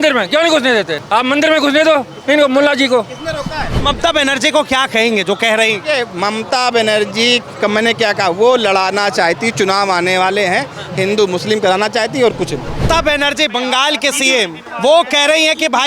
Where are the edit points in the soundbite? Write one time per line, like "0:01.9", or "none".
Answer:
0:01.0
0:03.8
0:07.5
0:12.8
0:14.6